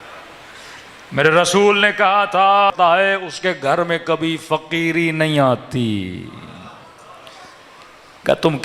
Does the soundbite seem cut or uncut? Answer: cut